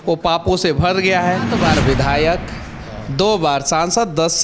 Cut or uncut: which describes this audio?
cut